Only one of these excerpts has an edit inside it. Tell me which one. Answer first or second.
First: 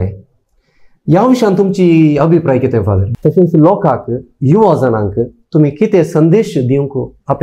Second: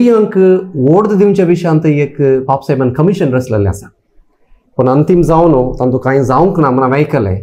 first